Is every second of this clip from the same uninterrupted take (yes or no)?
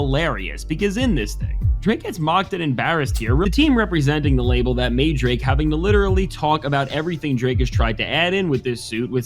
no